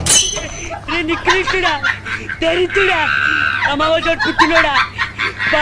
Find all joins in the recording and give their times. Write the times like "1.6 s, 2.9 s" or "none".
none